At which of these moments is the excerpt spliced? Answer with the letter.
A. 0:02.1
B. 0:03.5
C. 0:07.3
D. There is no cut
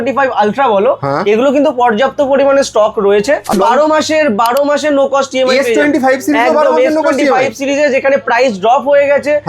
B